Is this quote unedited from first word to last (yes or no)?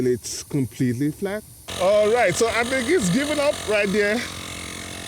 no